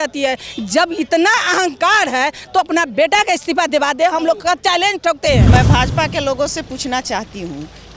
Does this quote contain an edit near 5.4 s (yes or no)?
yes